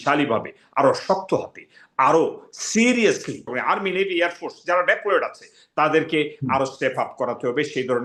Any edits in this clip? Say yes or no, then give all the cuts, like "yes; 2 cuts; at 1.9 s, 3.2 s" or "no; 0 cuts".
no; 0 cuts